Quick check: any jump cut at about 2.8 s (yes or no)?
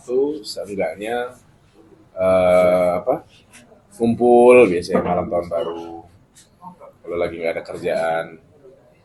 no